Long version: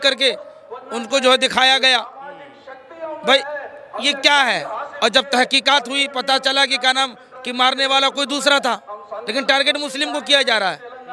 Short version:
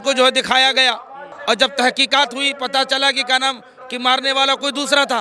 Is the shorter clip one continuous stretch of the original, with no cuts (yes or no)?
no